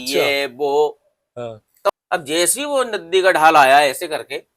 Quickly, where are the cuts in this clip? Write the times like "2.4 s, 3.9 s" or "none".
1.9 s